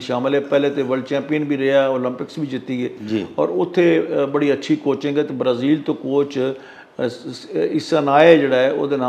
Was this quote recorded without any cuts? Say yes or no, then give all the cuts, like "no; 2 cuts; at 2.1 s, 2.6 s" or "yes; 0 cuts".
yes; 0 cuts